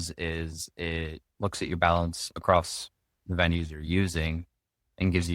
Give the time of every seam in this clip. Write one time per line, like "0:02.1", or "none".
0:01.2